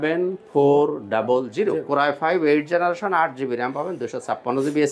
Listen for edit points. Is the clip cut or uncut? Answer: uncut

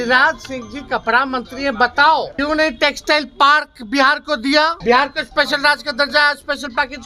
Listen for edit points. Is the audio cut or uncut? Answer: cut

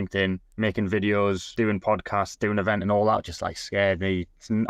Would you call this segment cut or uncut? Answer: cut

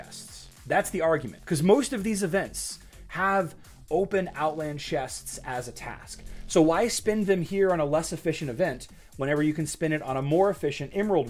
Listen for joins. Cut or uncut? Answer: uncut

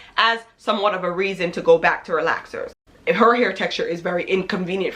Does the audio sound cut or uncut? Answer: cut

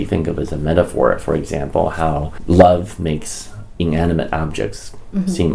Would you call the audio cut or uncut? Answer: cut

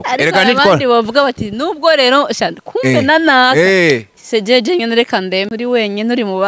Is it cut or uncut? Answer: cut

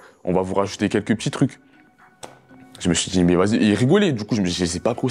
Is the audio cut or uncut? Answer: uncut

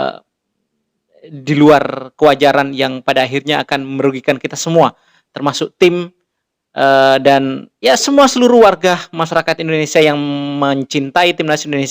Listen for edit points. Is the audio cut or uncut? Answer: uncut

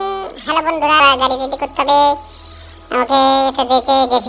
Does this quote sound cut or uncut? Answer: cut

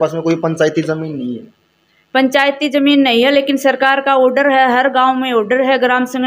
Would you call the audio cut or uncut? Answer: uncut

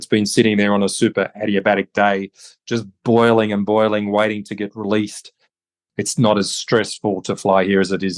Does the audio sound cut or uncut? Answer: cut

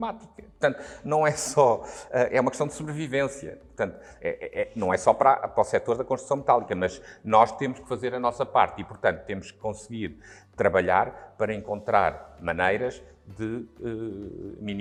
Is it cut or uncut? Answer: uncut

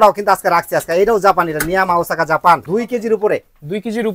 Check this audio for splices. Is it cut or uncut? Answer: cut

